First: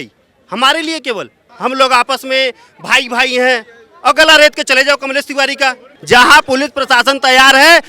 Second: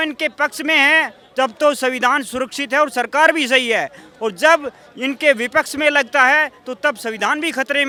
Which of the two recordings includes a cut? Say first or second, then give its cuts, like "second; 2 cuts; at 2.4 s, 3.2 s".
first; 2 cuts; at 1.4 s, 5.9 s